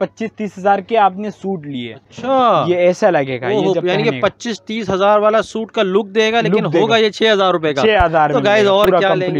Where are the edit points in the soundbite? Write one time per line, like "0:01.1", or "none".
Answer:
none